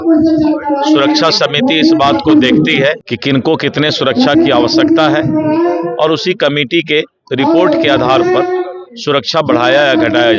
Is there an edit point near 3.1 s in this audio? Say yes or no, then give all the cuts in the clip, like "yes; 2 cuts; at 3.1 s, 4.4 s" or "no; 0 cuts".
yes; 1 cut; at 3.1 s